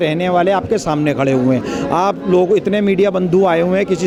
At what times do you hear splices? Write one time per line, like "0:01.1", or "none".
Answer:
none